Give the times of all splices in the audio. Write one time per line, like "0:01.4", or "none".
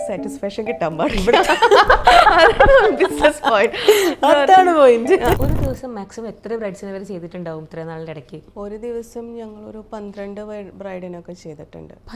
0:05.4
0:08.4